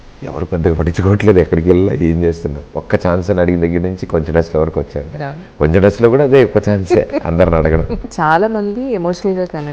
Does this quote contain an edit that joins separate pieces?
yes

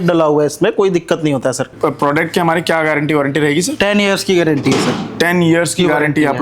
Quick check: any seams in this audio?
yes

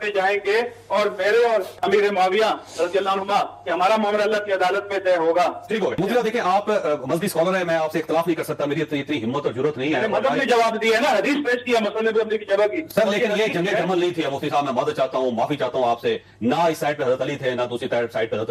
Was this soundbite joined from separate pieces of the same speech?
no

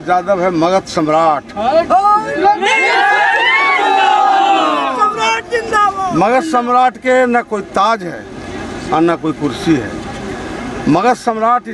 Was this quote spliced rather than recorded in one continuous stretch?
no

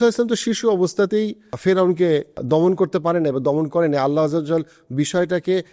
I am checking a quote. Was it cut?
yes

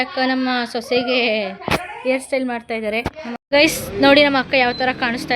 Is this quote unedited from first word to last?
no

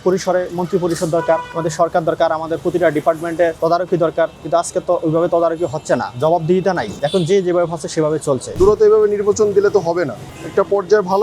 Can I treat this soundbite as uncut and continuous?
no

